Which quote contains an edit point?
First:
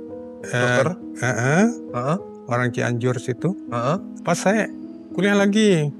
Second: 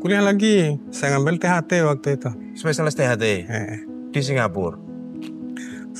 first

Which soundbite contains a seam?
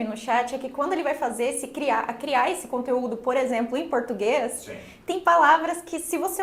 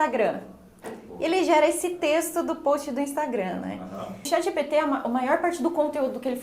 second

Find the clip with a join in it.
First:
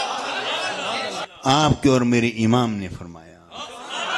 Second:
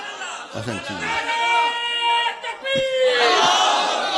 first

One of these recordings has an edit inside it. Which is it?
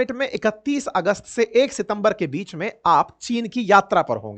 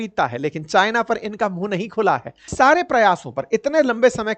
second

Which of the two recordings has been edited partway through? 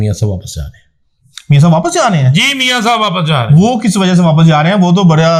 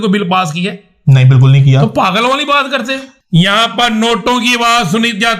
second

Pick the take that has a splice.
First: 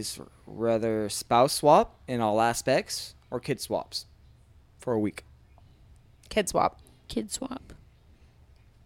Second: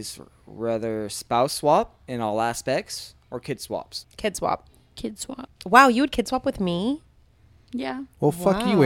second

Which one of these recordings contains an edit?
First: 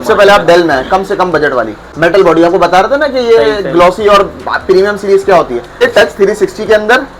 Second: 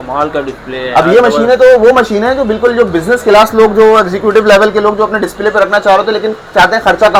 first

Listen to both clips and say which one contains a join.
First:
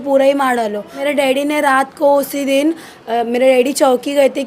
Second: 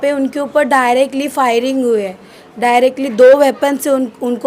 first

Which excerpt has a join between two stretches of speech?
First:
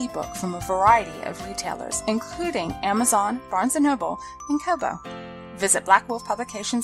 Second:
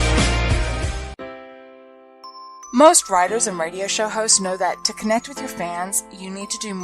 second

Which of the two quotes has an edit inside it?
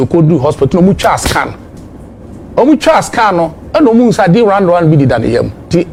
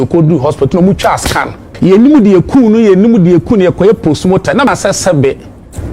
second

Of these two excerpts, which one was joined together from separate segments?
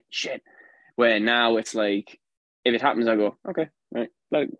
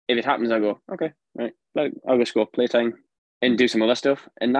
second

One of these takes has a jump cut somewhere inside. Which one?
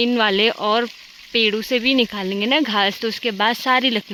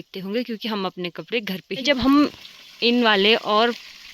second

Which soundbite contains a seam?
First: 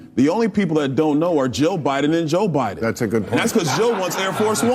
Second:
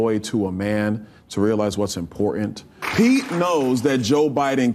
second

